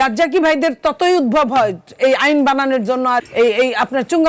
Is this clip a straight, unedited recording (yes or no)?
no